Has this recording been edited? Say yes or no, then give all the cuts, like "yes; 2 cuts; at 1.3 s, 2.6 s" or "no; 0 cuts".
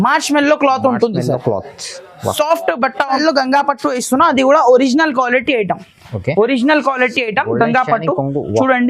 yes; 1 cut; at 3.2 s